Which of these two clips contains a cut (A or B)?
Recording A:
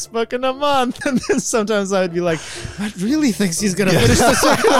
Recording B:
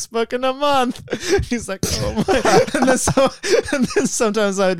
A